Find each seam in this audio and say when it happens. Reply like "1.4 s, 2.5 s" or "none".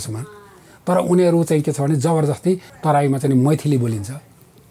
2.7 s